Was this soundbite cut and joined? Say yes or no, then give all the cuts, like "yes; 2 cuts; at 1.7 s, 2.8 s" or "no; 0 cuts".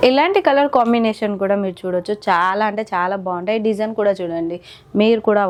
no; 0 cuts